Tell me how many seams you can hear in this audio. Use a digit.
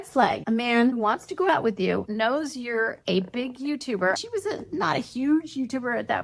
0